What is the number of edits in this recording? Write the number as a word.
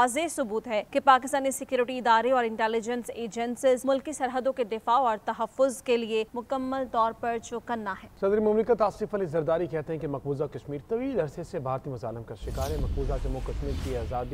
one